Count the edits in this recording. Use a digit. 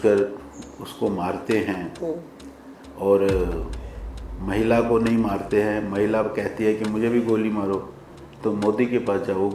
0